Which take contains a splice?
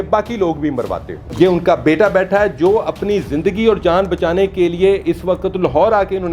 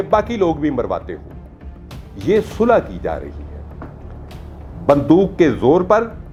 first; 1 cut; at 1.2 s

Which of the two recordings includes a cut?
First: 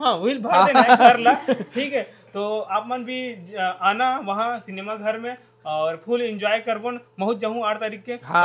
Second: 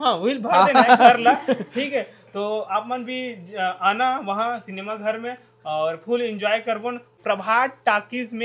second; 1 cut; at 7.1 s

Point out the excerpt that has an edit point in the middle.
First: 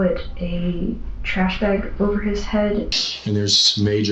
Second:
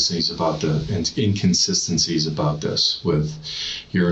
first; 1 cut; at 2.9 s

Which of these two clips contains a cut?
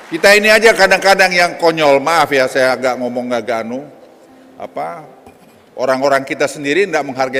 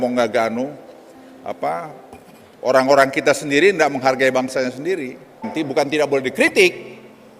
second; 1 cut; at 5.5 s

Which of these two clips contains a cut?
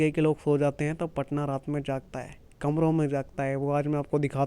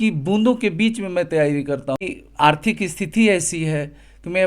second; 1 cut; at 2.0 s

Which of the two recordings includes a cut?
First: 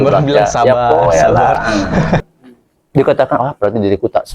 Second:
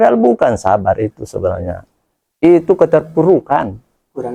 first; 1 cut; at 2.2 s

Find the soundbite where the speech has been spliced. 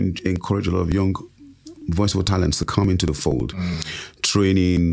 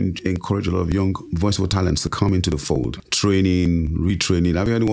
second; 2 cuts; at 1.3 s, 3.0 s

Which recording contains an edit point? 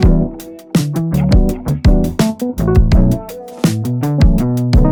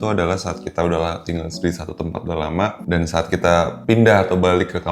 second; 2 cuts; at 2.8 s, 3.8 s

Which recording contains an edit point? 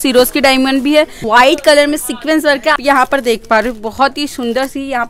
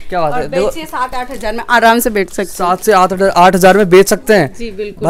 first; 2 cuts; at 1.2 s, 2.7 s

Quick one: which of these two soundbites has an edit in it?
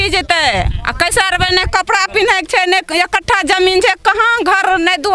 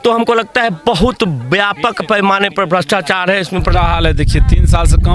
second; 1 cut; at 3.7 s

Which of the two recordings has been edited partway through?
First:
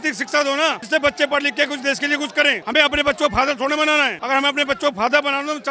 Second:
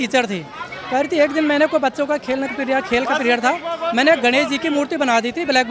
first; 3 cuts; at 0.8 s, 2.6 s, 4.2 s

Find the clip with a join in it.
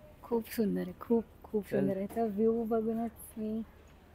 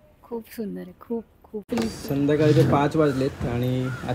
second; 1 cut; at 1.7 s

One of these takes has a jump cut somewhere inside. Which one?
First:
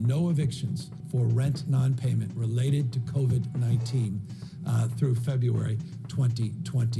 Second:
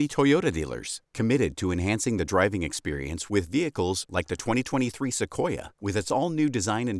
first; 1 cut; at 0.9 s

